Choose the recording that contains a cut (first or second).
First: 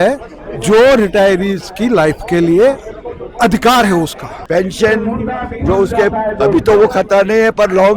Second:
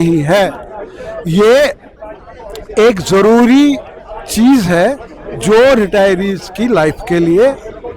first